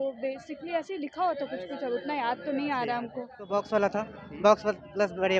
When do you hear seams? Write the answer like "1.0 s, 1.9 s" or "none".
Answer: 3.4 s